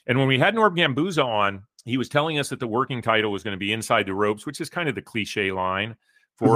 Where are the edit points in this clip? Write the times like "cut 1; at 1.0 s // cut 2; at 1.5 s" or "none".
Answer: cut 1; at 1.7 s